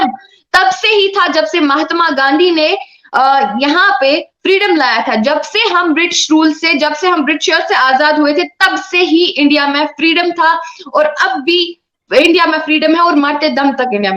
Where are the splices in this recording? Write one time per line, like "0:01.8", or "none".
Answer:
none